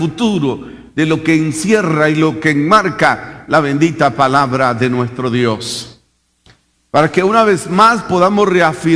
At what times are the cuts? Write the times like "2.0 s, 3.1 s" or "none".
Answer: none